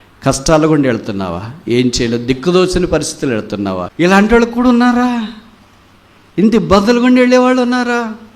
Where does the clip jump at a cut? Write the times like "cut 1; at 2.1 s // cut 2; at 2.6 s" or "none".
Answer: cut 1; at 3.9 s